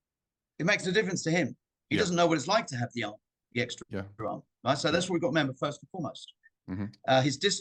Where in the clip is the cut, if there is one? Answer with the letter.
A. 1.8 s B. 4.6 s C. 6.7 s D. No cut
D